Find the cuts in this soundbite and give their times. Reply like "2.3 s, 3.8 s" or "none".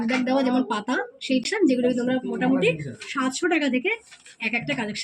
1.4 s